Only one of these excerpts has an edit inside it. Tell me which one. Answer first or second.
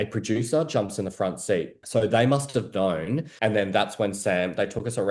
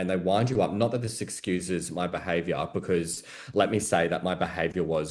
first